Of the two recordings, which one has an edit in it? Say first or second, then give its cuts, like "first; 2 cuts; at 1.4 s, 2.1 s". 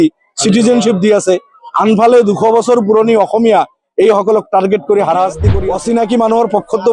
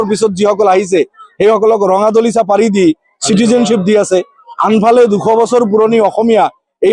first; 1 cut; at 5.5 s